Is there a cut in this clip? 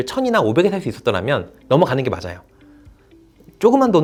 no; 0 cuts

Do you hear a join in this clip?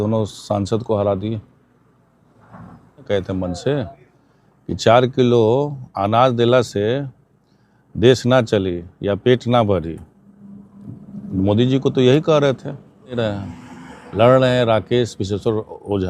yes; 2 cuts; at 3.1 s, 13.2 s

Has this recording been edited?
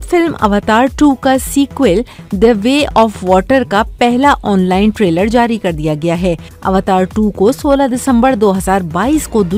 no; 0 cuts

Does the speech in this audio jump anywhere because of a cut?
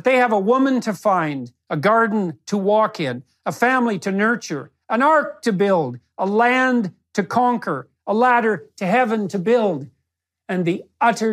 yes; 1 cut; at 2.6 s

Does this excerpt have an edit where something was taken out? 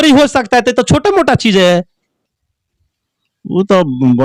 no; 0 cuts

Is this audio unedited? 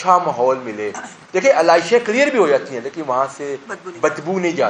yes; 0 cuts

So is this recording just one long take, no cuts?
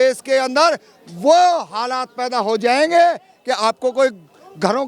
yes; 0 cuts

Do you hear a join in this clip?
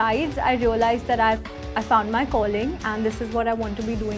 no; 0 cuts

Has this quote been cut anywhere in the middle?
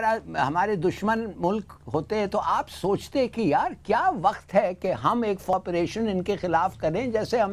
yes; 1 cut; at 5.5 s

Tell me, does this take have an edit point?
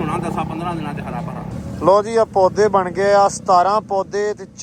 yes; 1 cut; at 1.5 s

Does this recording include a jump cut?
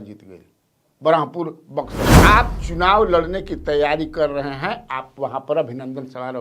yes; 1 cut; at 2.1 s

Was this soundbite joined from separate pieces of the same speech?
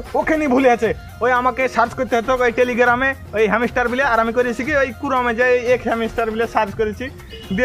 no; 0 cuts

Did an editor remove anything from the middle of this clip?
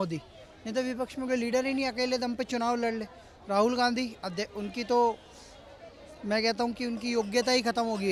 no; 0 cuts

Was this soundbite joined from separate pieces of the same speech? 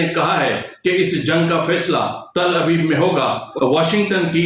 yes; 1 cut; at 3.5 s

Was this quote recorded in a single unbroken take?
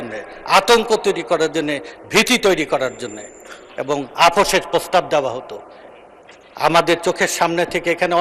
yes; 0 cuts

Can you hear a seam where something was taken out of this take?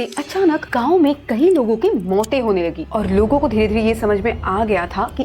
yes; 1 cut; at 2.8 s

